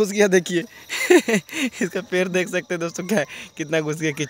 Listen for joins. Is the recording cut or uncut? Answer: uncut